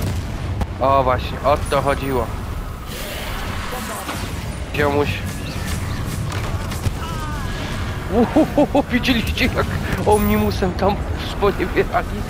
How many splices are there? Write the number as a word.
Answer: one